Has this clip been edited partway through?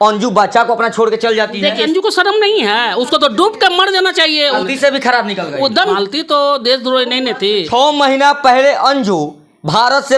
yes; 4 cuts; at 1.8 s, 4.6 s, 6.0 s, 7.7 s

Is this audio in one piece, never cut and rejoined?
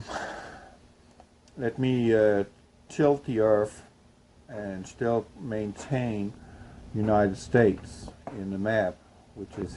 no; 1 cut; at 7.6 s

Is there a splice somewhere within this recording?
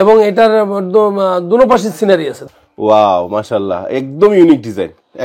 yes; 1 cut; at 2.3 s

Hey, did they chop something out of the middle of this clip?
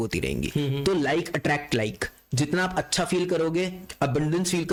no; 0 cuts

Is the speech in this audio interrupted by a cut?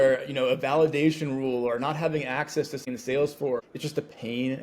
yes; 1 cut; at 2.8 s

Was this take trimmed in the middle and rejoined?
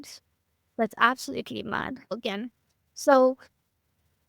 yes; 1 cut; at 2.1 s

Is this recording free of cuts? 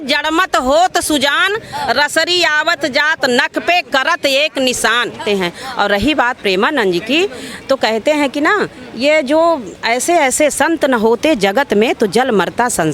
no; 1 cut; at 5.2 s

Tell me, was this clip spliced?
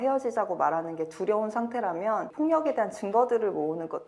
yes; 1 cut; at 2.3 s

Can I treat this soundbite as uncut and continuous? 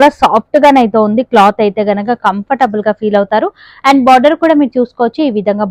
yes; 0 cuts

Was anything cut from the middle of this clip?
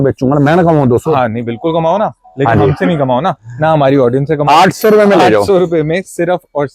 no; 0 cuts

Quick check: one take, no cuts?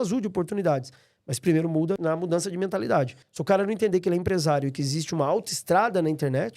no; 2 cuts; at 2.0 s, 3.2 s

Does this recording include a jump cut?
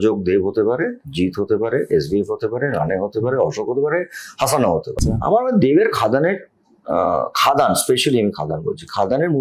yes; 1 cut; at 5.0 s

